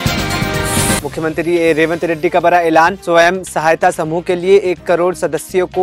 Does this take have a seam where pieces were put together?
yes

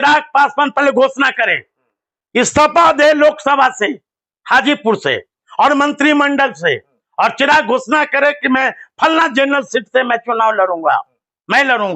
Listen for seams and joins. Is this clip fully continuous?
yes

